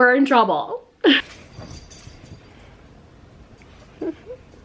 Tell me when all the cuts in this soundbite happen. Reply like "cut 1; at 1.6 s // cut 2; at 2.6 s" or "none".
cut 1; at 1.3 s

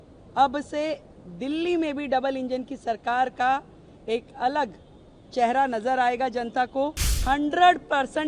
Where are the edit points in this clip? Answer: cut 1; at 7.2 s

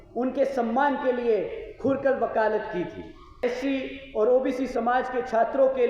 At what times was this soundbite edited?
cut 1; at 3.4 s

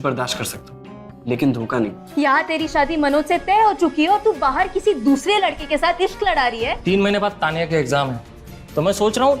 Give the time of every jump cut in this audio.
cut 1; at 2.0 s // cut 2; at 6.8 s

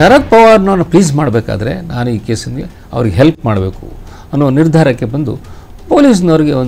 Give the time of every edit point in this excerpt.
none

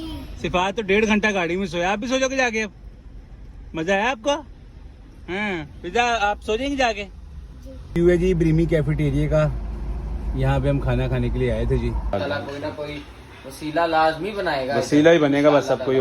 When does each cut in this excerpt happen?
cut 1; at 7.9 s // cut 2; at 12.1 s

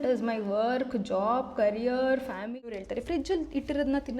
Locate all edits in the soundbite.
cut 1; at 2.7 s

